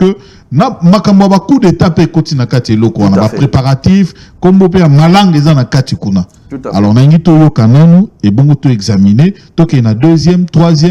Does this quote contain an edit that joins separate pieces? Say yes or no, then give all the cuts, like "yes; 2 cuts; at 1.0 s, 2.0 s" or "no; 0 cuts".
no; 0 cuts